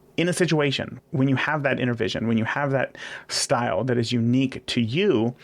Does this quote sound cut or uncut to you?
cut